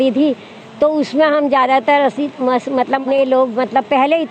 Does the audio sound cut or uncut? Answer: cut